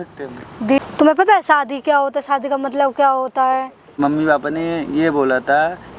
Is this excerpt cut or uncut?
cut